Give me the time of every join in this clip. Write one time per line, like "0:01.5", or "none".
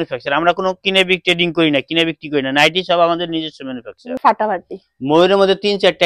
0:04.1